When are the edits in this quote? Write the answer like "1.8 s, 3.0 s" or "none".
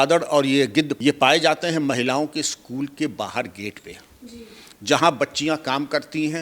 0.9 s